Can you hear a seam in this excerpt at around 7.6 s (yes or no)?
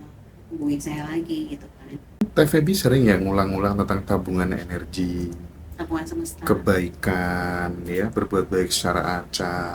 no